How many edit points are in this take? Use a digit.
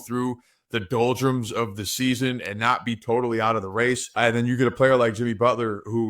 1